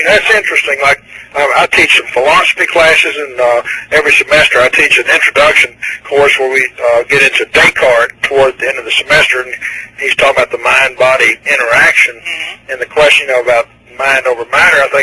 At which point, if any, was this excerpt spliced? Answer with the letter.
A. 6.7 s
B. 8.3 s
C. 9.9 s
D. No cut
D